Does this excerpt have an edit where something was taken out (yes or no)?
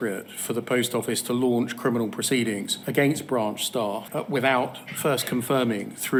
no